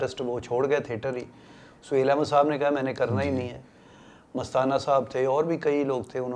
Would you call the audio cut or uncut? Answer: uncut